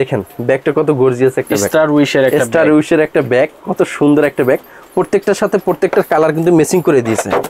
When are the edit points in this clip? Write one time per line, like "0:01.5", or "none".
none